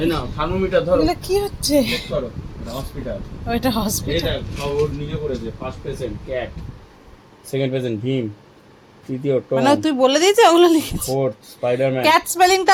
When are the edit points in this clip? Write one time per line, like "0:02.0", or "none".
none

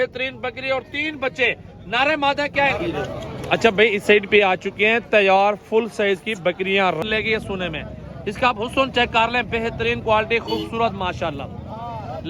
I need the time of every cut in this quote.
0:02.8
0:07.0

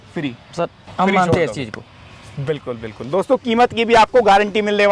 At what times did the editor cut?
none

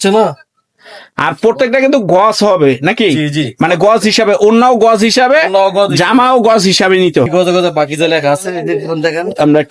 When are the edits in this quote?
0:07.3

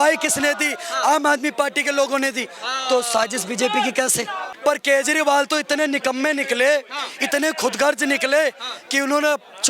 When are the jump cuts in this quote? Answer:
0:04.4

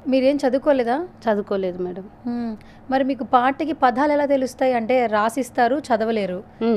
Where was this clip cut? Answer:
none

